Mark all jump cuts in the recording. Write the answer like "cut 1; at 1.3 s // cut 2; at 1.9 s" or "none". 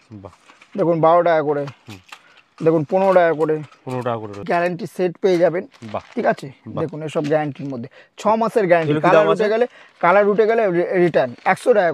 cut 1; at 4.3 s